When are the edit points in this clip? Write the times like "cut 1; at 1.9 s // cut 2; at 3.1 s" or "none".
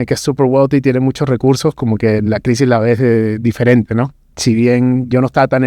cut 1; at 4.2 s